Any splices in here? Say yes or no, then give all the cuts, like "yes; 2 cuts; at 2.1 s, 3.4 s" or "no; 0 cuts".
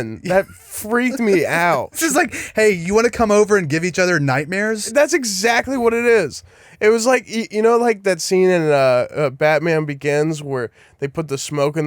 yes; 2 cuts; at 2.0 s, 4.8 s